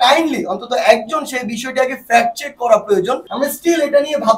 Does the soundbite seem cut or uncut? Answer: cut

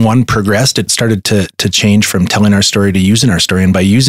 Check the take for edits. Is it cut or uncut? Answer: cut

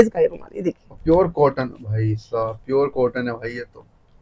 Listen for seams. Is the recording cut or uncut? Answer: uncut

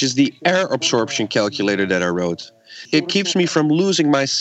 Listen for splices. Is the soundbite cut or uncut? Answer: cut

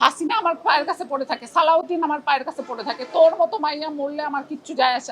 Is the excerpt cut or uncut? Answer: uncut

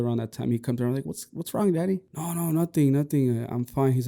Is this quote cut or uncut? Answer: cut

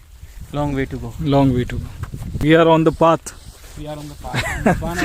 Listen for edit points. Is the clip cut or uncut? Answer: cut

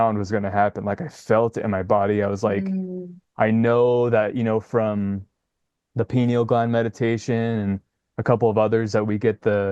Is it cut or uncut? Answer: uncut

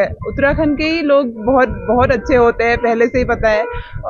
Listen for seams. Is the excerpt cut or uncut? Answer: uncut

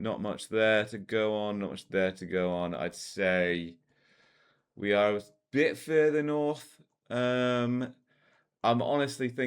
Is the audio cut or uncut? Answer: uncut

